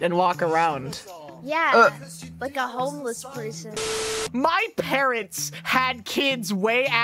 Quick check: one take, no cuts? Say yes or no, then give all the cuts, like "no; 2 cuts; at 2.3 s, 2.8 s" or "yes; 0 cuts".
no; 1 cut; at 4.0 s